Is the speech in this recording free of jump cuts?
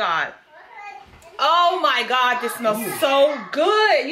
yes; 0 cuts

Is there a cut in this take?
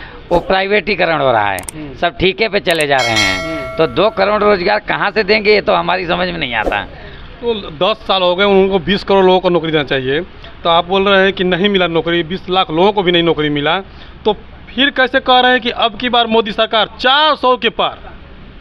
no; 0 cuts

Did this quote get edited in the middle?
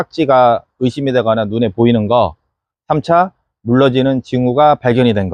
no; 0 cuts

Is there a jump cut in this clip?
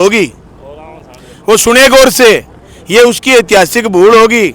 no; 0 cuts

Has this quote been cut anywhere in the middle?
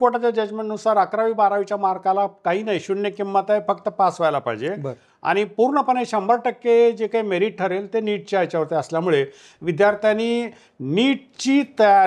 no; 0 cuts

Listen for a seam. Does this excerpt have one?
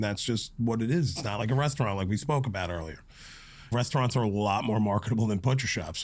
yes; 1 cut; at 3.7 s

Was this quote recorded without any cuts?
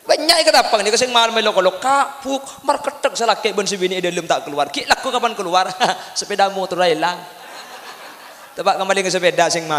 yes; 0 cuts

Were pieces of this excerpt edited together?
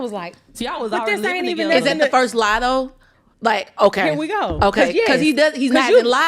no; 0 cuts

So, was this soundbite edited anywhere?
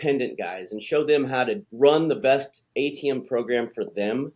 yes; 2 cuts; at 1.7 s, 2.6 s

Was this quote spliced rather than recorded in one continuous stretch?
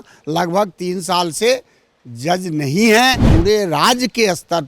yes; 1 cut; at 3.2 s

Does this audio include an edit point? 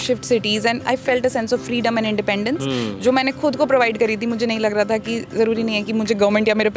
no; 0 cuts

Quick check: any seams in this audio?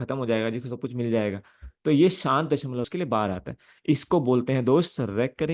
yes; 1 cut; at 2.9 s

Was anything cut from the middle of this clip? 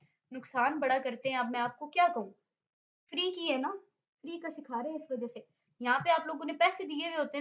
no; 0 cuts

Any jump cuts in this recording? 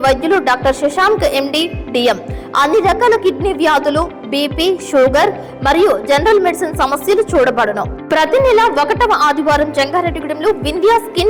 no; 0 cuts

